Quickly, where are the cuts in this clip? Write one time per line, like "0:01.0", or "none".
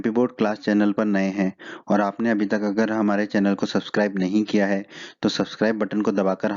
0:03.4